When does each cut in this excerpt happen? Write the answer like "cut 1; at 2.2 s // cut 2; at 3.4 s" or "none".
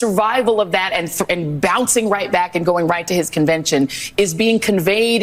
none